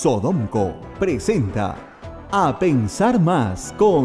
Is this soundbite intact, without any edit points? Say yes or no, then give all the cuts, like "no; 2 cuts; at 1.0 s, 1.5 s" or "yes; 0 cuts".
yes; 0 cuts